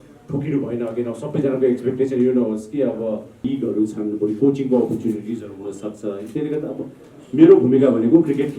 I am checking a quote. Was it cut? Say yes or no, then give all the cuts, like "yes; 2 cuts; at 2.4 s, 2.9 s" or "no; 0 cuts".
yes; 1 cut; at 3.4 s